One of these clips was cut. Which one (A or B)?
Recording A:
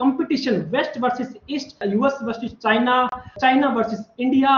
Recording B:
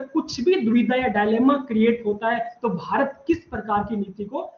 A